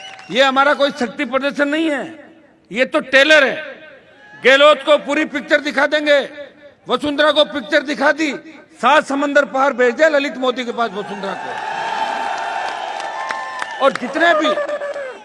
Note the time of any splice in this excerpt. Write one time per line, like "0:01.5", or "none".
none